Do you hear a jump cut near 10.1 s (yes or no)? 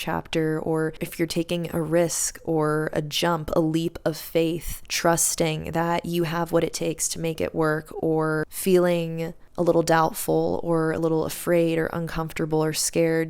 no